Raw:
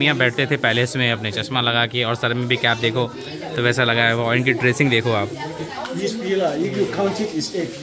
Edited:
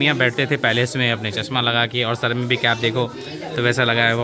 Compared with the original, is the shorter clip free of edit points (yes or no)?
yes